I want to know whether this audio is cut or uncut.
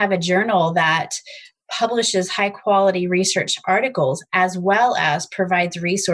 uncut